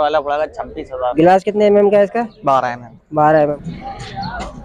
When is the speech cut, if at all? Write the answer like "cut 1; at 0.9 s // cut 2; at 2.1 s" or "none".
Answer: cut 1; at 1.1 s // cut 2; at 3.6 s